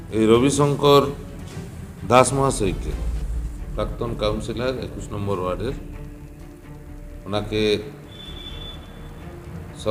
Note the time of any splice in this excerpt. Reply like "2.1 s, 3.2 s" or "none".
none